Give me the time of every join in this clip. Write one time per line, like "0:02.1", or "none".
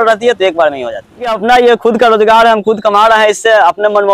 0:01.4

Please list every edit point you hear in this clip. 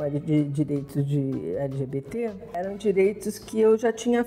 0:02.5

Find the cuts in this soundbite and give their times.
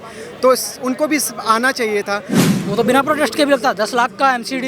0:02.3

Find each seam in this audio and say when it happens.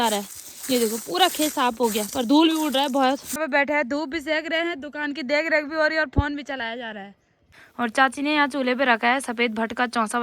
0:03.4
0:07.5

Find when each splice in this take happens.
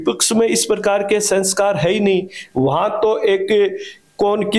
none

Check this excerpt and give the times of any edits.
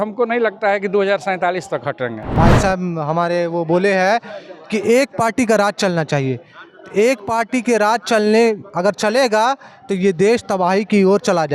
0:02.3

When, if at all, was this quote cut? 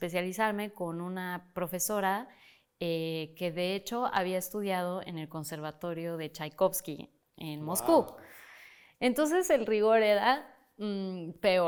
none

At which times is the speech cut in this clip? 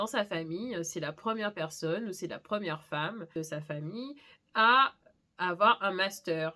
none

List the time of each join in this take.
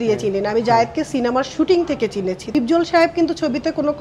0:02.5

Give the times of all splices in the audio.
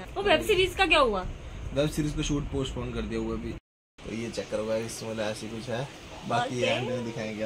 0:03.6

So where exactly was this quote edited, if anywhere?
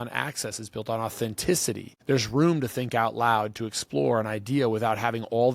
0:01.9

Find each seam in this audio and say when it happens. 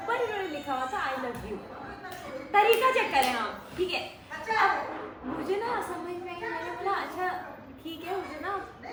none

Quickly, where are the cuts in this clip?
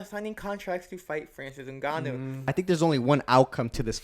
0:02.5

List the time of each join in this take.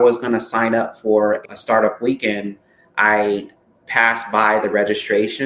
0:01.4

